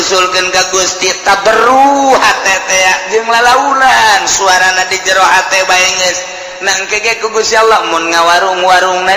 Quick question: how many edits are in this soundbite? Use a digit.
0